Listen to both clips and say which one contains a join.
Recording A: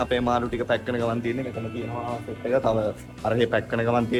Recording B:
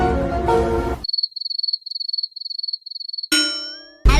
B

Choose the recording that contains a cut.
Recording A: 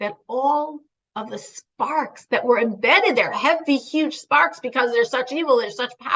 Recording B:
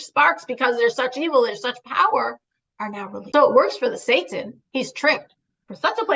B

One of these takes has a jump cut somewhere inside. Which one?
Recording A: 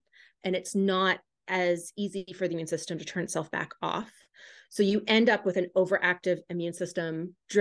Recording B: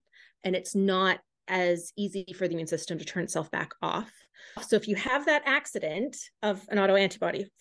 B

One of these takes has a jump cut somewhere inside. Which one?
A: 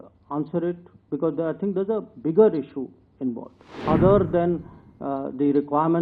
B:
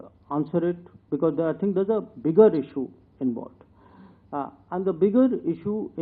A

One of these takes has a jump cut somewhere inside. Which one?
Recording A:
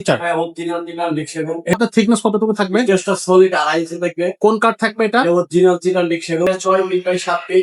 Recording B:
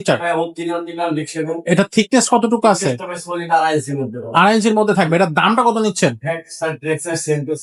A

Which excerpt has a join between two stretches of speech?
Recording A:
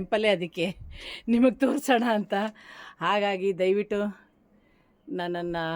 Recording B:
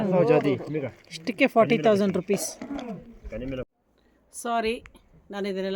B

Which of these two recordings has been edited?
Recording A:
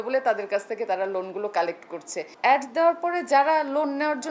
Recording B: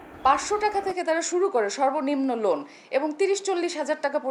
A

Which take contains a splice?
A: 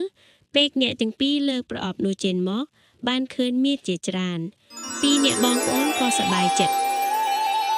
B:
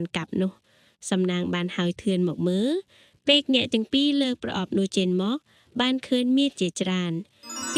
A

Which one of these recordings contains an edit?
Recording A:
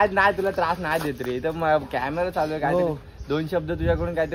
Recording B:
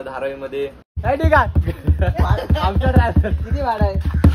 B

